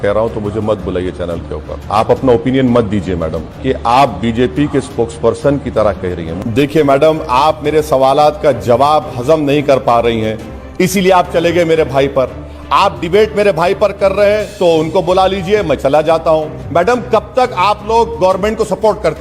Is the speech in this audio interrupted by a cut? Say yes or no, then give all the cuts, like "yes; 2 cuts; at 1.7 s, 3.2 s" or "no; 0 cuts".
yes; 4 cuts; at 1.8 s, 3.4 s, 6.3 s, 16.6 s